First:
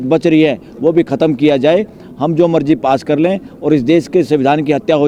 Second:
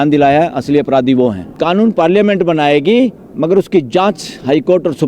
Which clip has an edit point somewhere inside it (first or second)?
second